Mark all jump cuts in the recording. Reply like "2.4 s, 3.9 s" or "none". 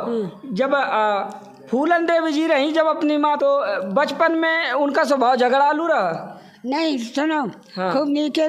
3.4 s